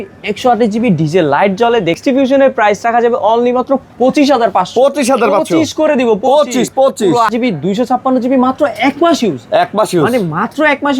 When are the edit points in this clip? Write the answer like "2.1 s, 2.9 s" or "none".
2.0 s, 7.3 s